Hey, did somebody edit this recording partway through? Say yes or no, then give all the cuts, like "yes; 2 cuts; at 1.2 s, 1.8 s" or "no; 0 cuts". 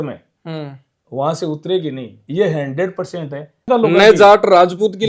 yes; 1 cut; at 3.7 s